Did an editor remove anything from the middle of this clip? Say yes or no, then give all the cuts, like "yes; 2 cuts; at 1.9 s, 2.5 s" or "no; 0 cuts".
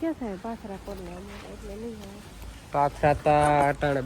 no; 0 cuts